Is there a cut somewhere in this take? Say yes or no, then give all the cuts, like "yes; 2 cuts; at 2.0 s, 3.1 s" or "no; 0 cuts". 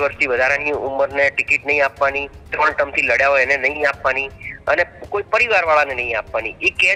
no; 0 cuts